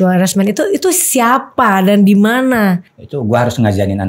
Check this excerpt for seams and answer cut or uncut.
cut